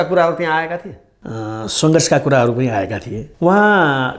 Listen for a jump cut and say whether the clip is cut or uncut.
cut